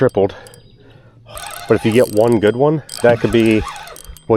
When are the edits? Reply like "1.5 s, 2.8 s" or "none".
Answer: 1.2 s